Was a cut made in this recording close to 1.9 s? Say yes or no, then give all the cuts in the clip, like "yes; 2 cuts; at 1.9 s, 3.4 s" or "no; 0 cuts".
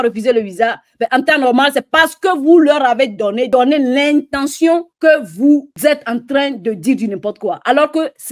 no; 3 cuts; at 3.5 s, 4.9 s, 5.7 s